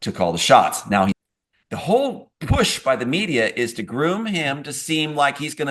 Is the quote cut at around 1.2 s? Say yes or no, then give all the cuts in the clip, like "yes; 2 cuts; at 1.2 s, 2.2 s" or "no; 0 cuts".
yes; 1 cut; at 1.2 s